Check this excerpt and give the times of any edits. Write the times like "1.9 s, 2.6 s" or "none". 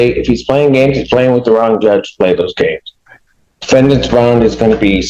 none